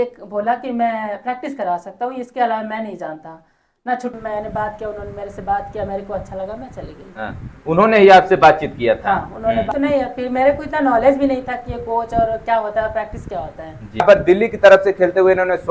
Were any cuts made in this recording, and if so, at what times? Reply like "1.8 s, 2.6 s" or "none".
4.2 s, 9.7 s, 14.0 s